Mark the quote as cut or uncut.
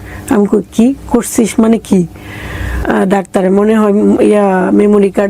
cut